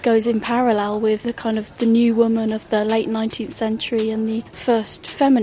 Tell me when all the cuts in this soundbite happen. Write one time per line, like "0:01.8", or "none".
0:01.2
0:04.5